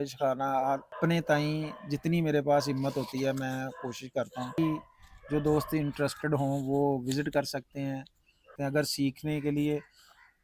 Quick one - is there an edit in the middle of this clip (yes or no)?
yes